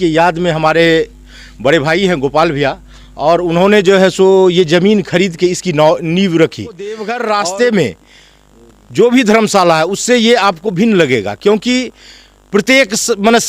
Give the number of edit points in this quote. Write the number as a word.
one